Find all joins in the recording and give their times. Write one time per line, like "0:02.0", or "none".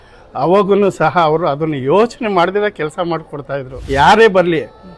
0:03.7